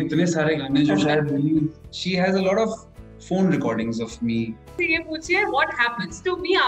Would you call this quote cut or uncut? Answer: cut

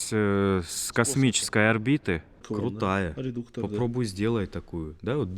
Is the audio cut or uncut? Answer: cut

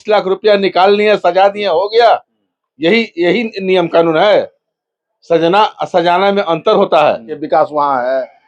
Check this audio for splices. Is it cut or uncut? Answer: cut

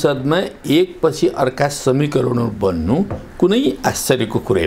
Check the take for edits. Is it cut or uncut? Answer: uncut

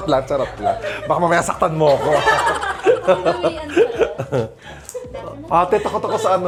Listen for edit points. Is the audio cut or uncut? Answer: uncut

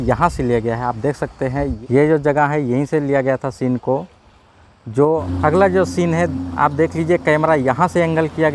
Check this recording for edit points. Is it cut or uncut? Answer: cut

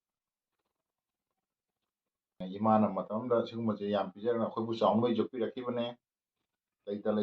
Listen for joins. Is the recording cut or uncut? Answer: cut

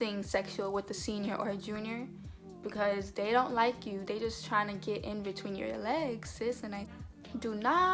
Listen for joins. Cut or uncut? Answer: cut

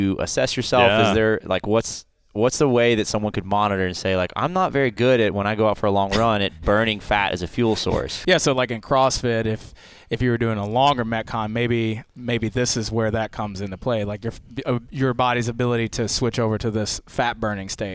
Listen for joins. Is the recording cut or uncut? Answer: cut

